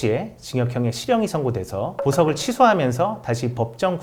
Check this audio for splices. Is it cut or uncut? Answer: uncut